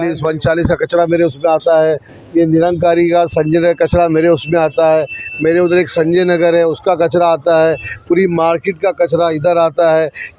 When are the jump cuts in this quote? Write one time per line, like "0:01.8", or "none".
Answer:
none

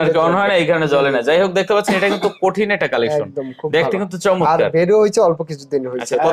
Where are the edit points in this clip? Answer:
none

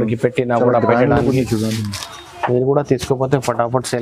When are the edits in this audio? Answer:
0:01.8

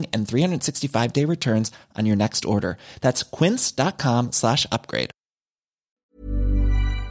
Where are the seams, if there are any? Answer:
0:05.9

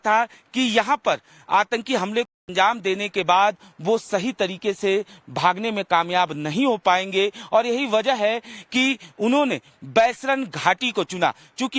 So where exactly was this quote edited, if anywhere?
0:10.8

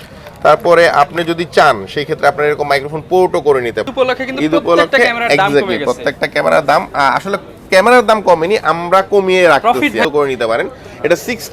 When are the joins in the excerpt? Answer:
0:03.9
0:10.0

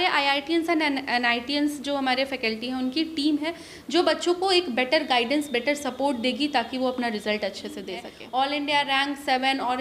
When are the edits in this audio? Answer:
0:08.1

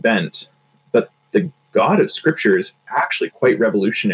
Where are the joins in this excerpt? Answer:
none

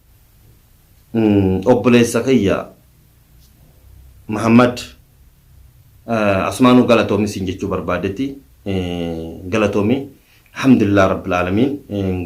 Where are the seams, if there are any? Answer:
none

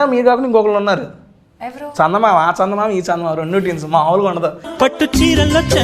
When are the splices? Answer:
none

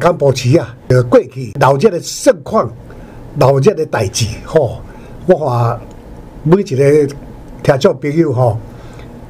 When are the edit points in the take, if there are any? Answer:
0:00.9
0:01.6

